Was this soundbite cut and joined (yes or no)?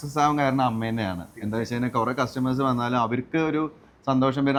no